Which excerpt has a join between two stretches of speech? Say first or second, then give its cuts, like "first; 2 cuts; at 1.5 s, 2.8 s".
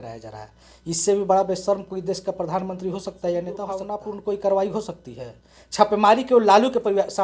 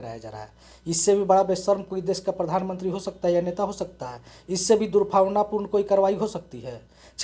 first; 1 cut; at 4.0 s